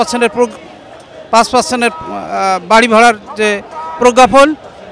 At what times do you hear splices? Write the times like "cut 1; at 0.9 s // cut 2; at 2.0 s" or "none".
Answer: none